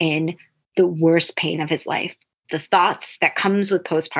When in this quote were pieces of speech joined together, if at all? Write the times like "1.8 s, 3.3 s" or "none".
2.4 s, 3.1 s